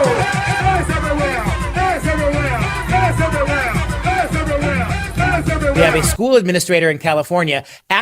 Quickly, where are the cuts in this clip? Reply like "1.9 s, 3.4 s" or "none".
5.8 s